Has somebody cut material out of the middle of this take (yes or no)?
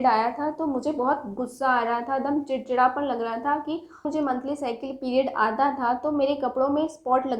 yes